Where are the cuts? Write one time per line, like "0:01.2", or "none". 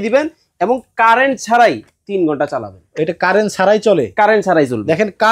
none